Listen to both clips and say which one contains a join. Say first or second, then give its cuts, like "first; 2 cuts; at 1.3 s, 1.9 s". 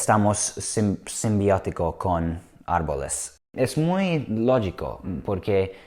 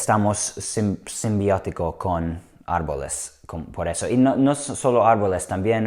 first; 1 cut; at 3.5 s